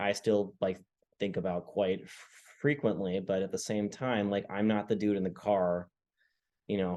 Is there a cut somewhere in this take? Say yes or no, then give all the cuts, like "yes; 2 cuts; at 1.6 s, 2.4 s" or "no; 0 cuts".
no; 0 cuts